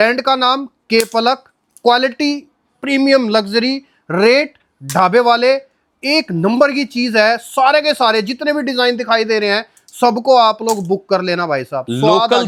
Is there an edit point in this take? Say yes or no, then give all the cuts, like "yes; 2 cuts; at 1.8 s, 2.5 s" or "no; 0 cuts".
no; 0 cuts